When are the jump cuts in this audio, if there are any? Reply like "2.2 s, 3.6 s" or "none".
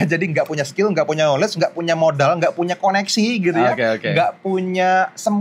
none